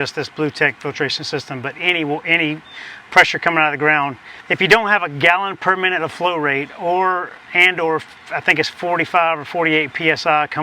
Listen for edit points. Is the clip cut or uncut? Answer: uncut